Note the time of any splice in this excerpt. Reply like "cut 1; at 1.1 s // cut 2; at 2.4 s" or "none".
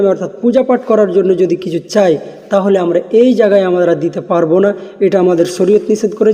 none